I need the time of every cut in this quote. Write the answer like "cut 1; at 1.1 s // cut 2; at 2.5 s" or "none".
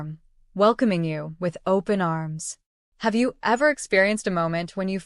cut 1; at 2.2 s // cut 2; at 4.1 s